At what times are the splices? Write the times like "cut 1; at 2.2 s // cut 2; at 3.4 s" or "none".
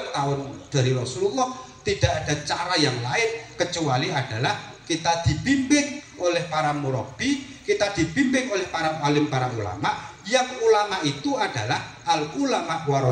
none